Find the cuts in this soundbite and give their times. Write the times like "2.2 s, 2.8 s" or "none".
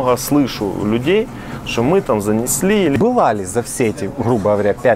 2.9 s

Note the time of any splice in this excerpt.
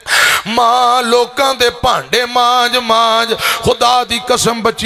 none

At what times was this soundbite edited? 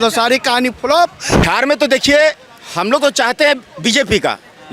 1.4 s

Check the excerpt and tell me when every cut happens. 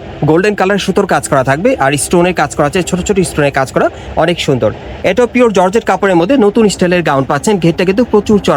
none

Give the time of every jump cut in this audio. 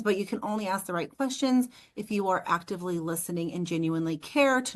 none

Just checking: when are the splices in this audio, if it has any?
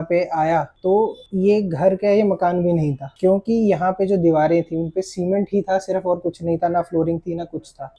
1.0 s

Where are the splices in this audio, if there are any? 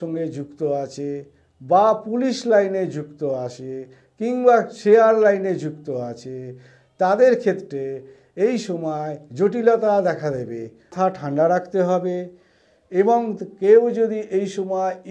10.9 s

